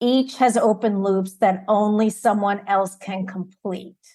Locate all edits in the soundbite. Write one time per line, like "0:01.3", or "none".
none

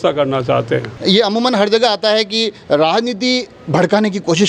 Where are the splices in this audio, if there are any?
0:00.9

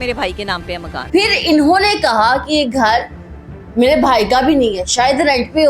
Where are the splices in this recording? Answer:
0:01.0

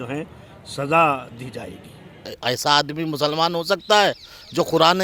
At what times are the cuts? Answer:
0:02.2

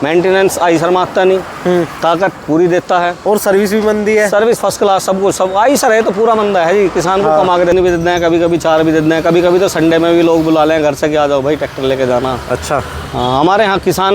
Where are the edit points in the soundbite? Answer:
0:07.7

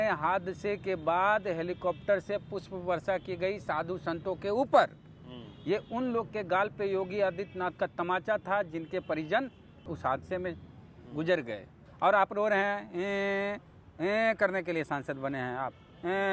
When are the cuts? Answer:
0:09.9
0:11.8

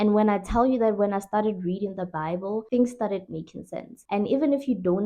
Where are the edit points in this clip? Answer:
none

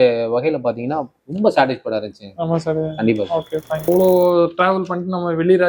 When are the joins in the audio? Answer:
0:03.9

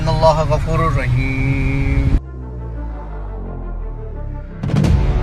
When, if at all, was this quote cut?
none

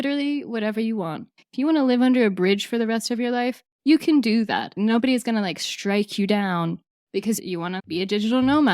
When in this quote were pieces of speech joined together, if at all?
0:07.4

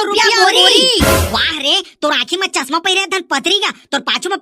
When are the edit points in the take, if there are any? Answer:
0:01.0

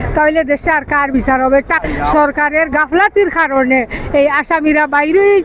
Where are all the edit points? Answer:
0:01.8

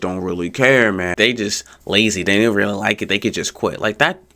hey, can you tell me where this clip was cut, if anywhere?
0:01.1

